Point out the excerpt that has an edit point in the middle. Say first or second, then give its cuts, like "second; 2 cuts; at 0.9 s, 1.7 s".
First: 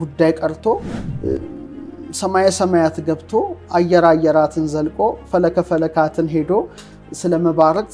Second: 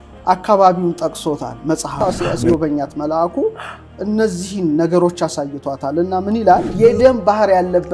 second; 2 cuts; at 2.0 s, 6.7 s